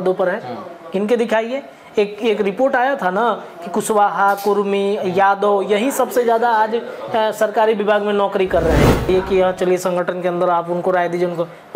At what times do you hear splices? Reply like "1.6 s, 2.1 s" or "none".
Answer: 9.1 s

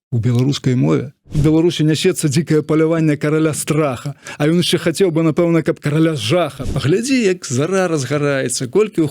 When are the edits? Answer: 1.3 s, 6.6 s

